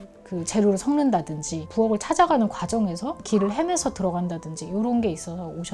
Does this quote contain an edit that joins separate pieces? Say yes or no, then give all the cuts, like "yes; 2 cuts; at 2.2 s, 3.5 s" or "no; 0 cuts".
no; 0 cuts